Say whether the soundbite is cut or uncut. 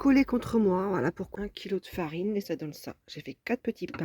cut